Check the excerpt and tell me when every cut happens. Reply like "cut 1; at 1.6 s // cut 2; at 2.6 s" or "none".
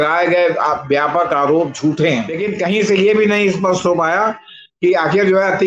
cut 1; at 2.4 s